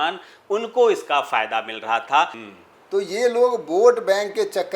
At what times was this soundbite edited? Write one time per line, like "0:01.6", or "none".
0:02.4